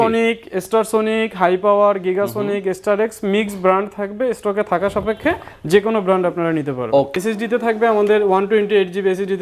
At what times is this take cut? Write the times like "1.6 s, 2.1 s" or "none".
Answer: 7.1 s